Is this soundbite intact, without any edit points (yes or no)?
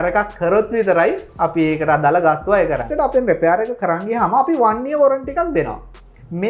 no